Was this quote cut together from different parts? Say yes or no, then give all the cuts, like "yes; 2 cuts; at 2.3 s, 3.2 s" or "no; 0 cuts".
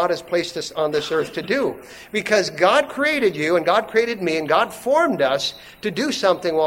no; 0 cuts